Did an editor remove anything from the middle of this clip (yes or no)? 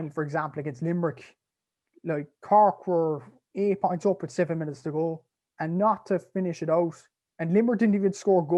no